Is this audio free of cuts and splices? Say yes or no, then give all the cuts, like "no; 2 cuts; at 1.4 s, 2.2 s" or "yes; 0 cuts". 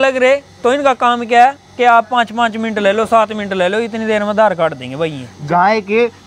no; 1 cut; at 5.3 s